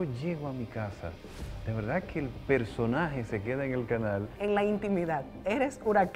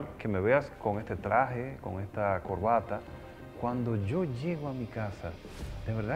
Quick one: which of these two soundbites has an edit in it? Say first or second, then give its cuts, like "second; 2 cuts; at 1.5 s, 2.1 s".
first; 1 cut; at 4.3 s